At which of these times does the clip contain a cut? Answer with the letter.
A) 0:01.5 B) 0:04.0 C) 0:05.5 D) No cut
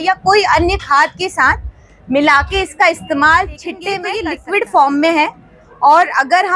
B